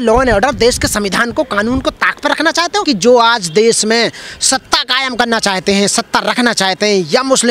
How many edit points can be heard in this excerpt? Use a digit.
1